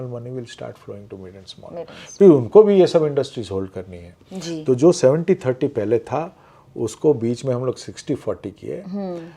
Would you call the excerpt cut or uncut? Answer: uncut